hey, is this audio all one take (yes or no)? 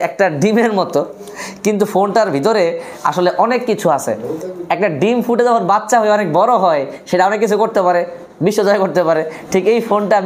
yes